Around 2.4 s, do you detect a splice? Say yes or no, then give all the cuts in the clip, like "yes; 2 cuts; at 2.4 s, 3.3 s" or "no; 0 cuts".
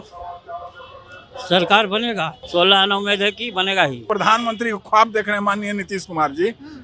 yes; 2 cuts; at 2.4 s, 4.1 s